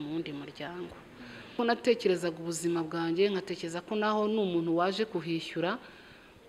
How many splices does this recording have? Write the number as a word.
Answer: one